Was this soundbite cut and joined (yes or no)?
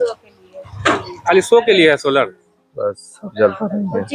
no